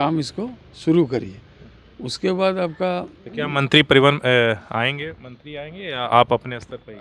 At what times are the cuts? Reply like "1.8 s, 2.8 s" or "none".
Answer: none